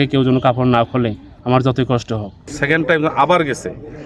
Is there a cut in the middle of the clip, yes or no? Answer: yes